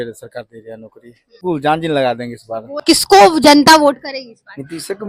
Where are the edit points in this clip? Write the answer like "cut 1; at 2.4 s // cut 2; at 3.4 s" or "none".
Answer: cut 1; at 1.4 s // cut 2; at 2.8 s